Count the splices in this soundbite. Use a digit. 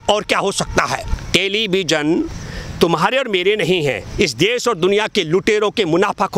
1